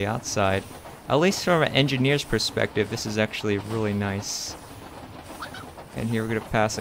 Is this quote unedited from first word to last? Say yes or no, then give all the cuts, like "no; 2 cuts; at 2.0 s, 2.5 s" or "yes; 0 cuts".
yes; 0 cuts